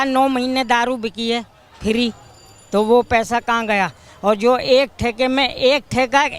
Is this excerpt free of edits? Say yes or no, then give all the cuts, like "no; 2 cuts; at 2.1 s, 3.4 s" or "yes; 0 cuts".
yes; 0 cuts